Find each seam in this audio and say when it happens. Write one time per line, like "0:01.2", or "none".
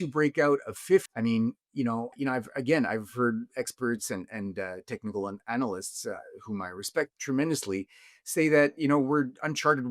0:01.1
0:02.1
0:07.2